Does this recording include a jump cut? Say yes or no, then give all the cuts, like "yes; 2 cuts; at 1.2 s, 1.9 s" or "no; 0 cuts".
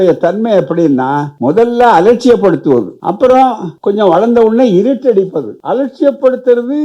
yes; 4 cuts; at 1.3 s, 2.9 s, 3.7 s, 5.5 s